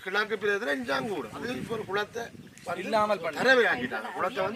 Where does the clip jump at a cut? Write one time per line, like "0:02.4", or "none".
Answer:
0:01.5